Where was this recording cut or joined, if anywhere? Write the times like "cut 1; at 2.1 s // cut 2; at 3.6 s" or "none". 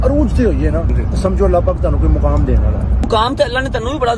cut 1; at 1.0 s // cut 2; at 3.1 s